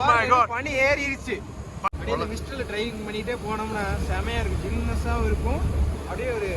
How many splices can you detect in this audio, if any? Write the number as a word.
one